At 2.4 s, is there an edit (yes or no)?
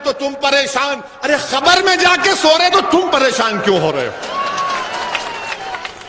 no